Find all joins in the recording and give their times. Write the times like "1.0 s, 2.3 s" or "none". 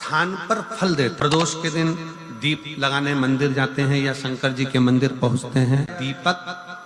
1.2 s, 5.9 s